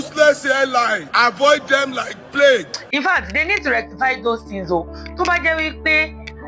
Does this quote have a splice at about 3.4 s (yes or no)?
no